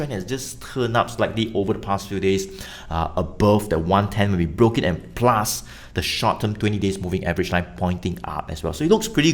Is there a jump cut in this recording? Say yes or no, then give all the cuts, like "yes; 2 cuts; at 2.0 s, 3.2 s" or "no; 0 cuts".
no; 0 cuts